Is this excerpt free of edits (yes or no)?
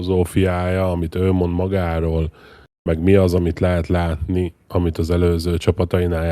yes